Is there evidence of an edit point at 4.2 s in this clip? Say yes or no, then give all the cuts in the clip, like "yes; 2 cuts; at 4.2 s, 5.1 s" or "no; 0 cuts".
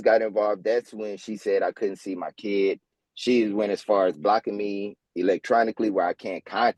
no; 0 cuts